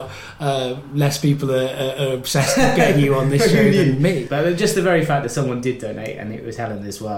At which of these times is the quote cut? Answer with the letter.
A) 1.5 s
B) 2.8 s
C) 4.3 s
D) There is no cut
C